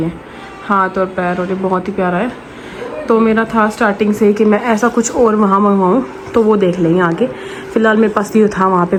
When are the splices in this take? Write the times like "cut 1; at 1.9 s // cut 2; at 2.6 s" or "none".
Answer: none